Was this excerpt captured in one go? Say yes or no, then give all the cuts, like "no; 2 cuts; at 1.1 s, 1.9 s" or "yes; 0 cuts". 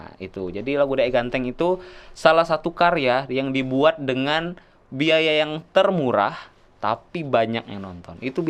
yes; 0 cuts